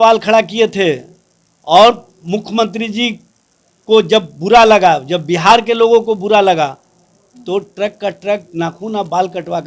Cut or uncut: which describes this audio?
uncut